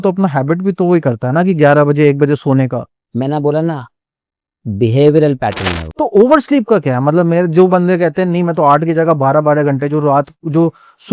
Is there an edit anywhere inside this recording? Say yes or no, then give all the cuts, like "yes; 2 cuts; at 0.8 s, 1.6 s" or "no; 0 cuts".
yes; 1 cut; at 5.9 s